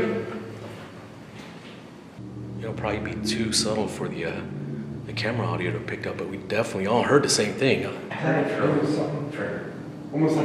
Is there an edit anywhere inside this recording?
yes; 2 cuts; at 2.2 s, 8.0 s

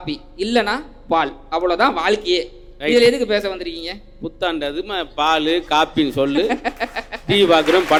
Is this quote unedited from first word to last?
yes; 0 cuts

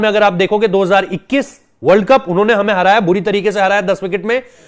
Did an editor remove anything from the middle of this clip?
no; 0 cuts

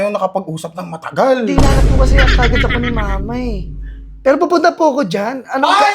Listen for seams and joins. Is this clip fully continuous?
yes; 0 cuts

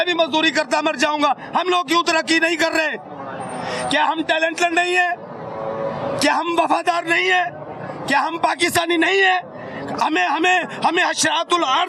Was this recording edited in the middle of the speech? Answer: no; 0 cuts

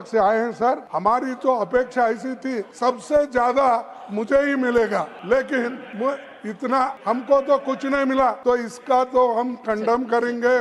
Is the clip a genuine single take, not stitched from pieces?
no; 6 cuts; at 0.9 s, 2.7 s, 5.2 s, 5.8 s, 7.0 s, 8.4 s

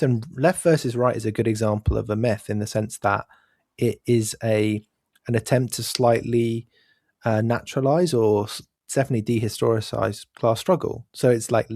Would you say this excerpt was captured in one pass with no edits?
yes; 0 cuts

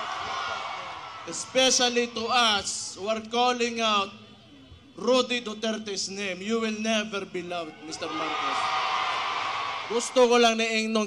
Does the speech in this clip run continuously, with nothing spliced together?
no; 2 cuts; at 1.1 s, 9.8 s

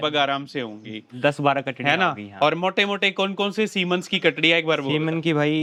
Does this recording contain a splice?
no; 0 cuts

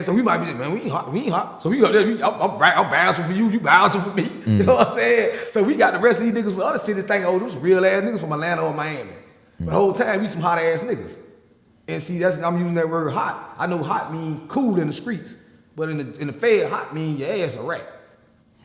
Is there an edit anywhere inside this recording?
no; 0 cuts

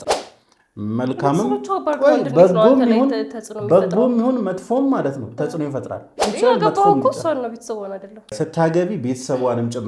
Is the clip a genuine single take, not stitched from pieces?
no; 2 cuts; at 6.2 s, 8.3 s

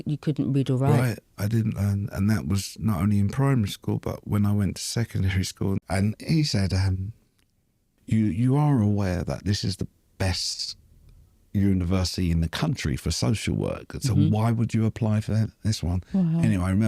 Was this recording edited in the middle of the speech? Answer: yes; 2 cuts; at 5.8 s, 7.9 s

